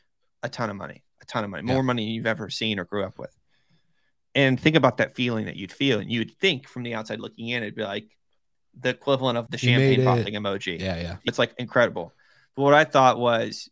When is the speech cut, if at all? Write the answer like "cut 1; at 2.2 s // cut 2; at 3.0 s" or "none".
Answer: cut 1; at 9.5 s // cut 2; at 11.3 s